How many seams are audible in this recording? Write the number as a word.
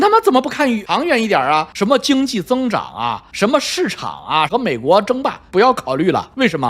three